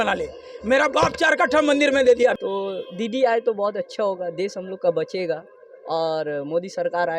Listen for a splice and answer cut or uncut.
cut